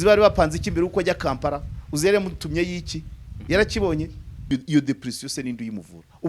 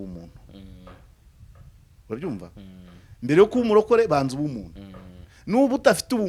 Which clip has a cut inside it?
first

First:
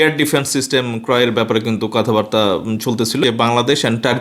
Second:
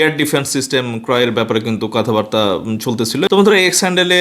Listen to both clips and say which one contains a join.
first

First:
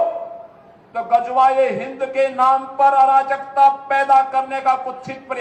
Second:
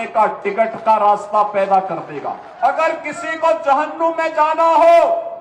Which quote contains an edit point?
second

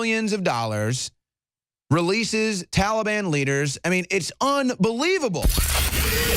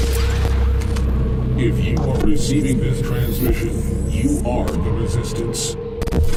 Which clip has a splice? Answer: first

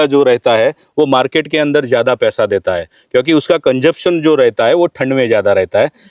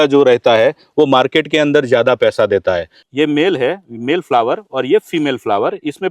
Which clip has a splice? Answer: second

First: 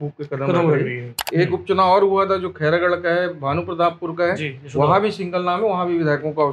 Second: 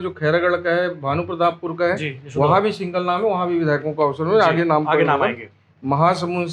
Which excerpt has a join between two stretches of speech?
first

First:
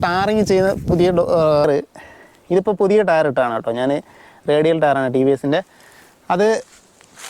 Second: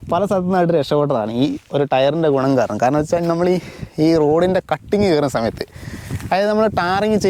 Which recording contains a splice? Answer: first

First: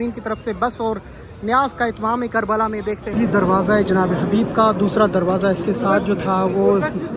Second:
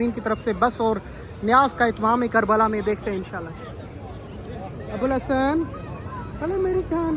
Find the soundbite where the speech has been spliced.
first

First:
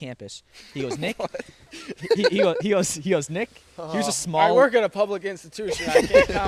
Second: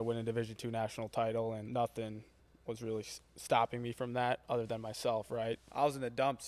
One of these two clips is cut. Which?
second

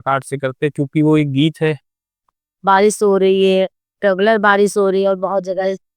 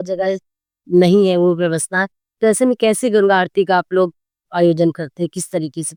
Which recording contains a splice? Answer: first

